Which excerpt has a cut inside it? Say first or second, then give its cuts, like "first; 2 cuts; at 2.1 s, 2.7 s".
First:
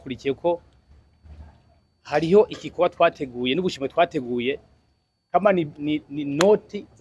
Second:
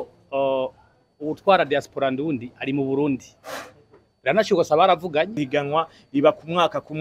second; 1 cut; at 5.4 s